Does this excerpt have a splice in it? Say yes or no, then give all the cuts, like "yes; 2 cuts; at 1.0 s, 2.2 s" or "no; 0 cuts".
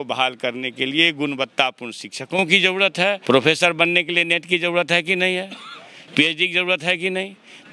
yes; 1 cut; at 3.2 s